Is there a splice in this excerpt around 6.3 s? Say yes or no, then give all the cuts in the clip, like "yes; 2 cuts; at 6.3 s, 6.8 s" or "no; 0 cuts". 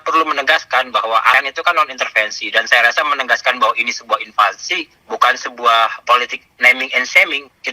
no; 1 cut; at 1.3 s